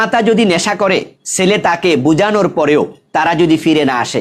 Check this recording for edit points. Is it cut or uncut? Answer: cut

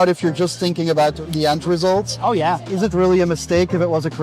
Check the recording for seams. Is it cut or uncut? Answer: cut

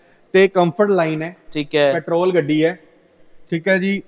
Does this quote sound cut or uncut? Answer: uncut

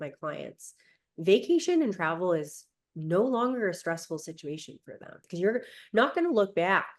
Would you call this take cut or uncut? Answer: cut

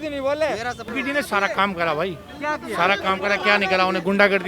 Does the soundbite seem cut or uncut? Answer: cut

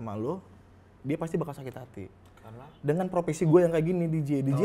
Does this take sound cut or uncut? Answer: uncut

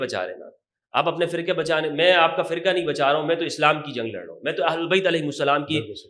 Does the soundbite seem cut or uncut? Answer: uncut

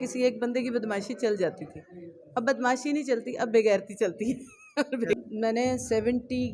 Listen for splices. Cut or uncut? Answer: cut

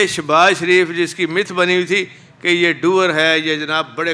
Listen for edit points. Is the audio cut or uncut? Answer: uncut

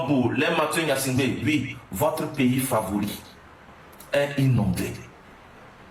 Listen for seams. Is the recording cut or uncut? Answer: uncut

